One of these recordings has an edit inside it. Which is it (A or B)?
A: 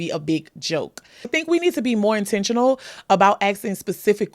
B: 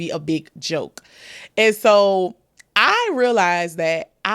A